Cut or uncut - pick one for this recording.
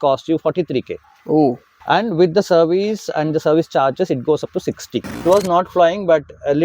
cut